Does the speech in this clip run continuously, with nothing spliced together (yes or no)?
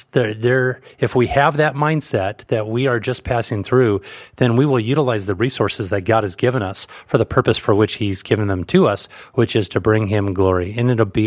yes